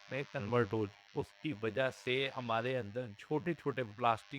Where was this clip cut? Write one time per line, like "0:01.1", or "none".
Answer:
0:01.0